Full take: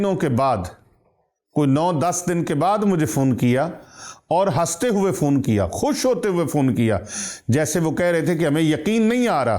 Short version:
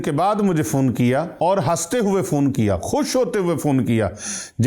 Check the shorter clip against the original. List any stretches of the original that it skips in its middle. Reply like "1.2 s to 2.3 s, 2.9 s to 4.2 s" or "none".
3.7 s to 4.2 s